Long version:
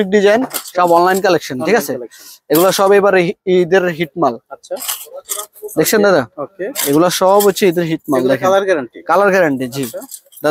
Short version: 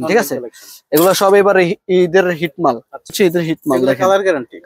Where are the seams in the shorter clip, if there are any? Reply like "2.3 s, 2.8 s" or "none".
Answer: 3.1 s